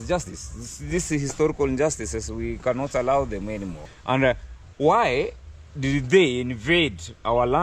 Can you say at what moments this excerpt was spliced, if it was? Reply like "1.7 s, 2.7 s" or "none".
3.9 s